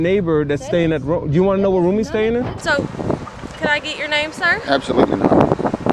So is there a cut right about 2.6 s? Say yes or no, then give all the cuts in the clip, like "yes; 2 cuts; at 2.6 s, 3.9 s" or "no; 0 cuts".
yes; 1 cut; at 2.6 s